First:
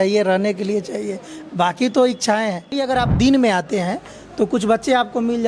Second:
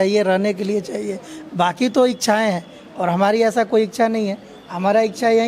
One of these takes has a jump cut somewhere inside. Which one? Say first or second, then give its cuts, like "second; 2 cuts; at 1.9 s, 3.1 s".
first; 1 cut; at 2.8 s